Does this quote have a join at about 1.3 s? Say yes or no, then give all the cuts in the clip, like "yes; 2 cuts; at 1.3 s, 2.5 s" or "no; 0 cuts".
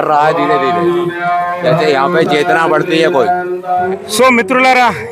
no; 1 cut; at 3.9 s